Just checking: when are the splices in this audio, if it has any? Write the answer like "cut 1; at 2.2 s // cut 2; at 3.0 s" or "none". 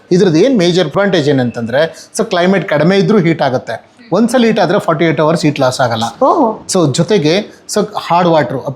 cut 1; at 0.9 s

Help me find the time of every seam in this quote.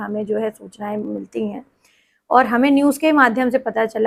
none

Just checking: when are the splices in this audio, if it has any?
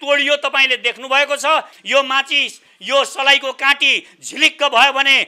cut 1; at 1.8 s

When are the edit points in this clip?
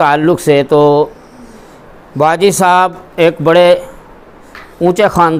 none

